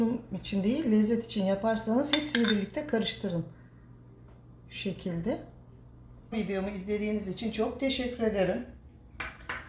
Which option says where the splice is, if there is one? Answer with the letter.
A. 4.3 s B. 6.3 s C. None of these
B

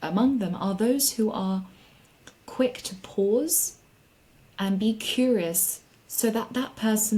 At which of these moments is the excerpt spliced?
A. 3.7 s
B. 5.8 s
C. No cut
C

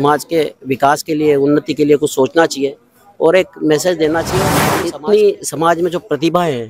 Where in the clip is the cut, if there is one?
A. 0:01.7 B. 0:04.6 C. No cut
B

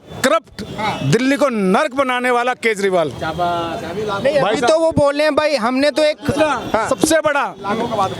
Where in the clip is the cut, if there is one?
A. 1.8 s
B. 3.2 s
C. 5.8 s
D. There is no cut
D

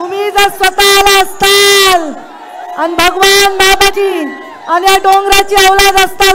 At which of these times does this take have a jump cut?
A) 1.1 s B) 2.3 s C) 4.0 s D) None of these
C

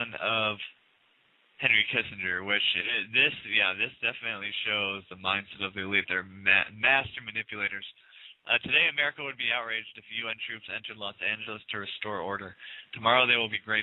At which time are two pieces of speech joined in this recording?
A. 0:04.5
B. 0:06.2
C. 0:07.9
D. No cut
B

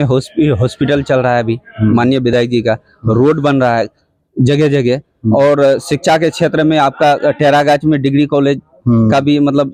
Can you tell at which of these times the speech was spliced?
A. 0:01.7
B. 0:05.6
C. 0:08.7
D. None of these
D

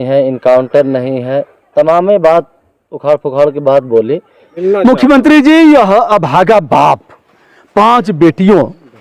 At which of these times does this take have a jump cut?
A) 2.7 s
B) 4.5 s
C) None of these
B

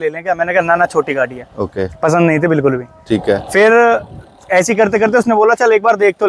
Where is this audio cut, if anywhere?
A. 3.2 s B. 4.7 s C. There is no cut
C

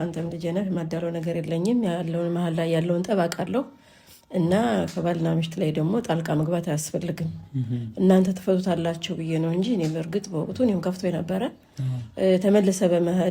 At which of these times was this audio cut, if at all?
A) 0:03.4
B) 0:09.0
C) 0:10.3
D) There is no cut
D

